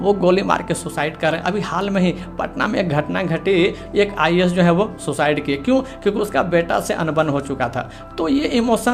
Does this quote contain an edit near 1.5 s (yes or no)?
no